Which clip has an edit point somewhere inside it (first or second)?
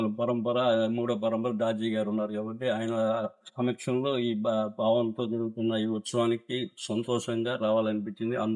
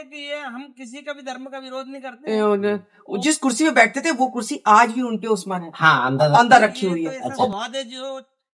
second